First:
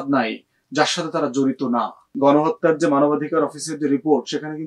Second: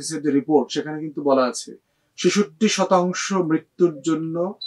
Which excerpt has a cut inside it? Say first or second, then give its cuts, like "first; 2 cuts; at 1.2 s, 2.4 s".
first; 1 cut; at 2.0 s